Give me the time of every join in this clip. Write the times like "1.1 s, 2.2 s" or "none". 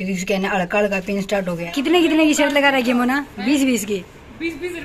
1.5 s

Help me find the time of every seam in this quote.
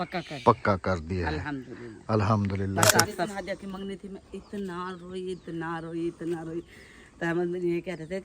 3.3 s

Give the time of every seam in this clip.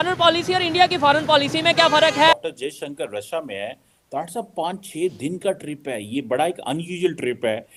none

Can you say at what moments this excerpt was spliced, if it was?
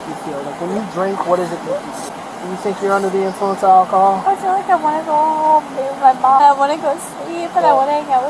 2.1 s, 6.4 s

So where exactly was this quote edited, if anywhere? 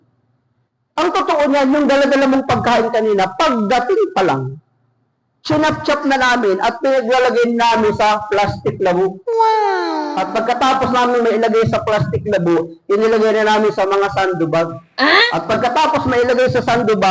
none

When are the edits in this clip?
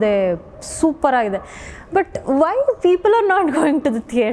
none

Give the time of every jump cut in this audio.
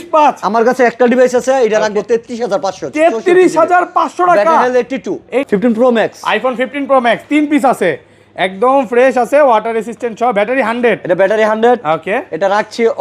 5.5 s

